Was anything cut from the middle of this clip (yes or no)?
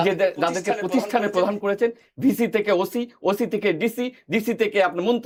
no